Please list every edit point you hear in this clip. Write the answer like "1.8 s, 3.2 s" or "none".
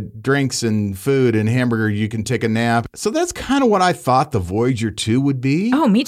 2.9 s

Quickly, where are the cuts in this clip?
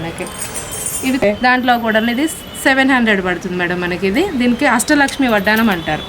1.2 s

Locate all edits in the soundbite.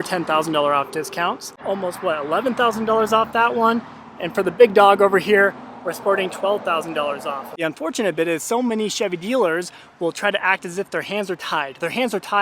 1.6 s, 7.5 s

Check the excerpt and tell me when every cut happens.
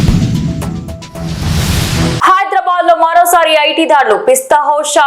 2.2 s

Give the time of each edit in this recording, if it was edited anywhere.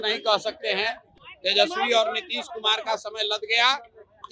1.1 s

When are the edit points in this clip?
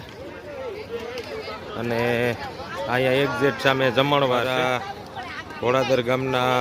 4.5 s

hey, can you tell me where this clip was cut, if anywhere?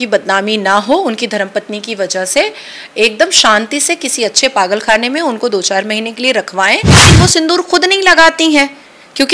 7.1 s

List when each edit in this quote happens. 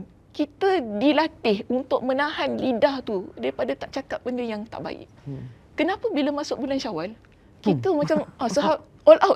none

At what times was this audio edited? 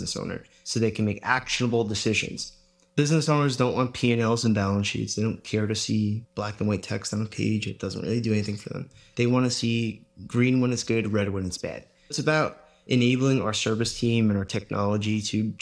6.2 s, 12.2 s

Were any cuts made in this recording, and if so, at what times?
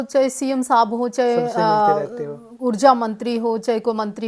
none

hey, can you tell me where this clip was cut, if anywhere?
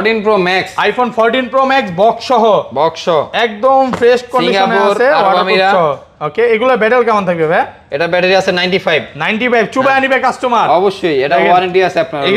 none

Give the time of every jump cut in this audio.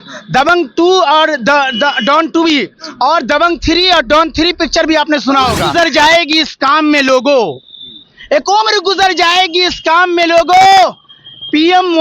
5.7 s

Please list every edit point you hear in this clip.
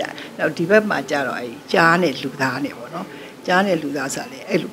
none

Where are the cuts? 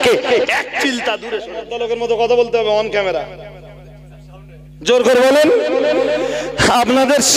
1.6 s

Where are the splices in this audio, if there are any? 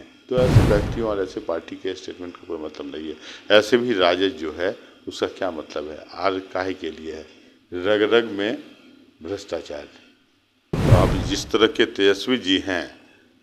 10.7 s

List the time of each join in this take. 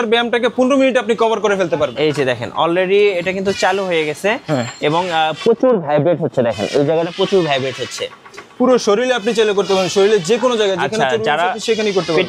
1.9 s

